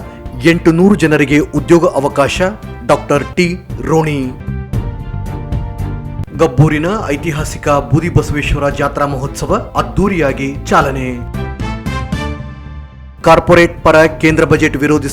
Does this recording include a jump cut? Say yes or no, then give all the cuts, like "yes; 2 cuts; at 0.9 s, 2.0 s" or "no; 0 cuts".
yes; 2 cuts; at 4.4 s, 6.3 s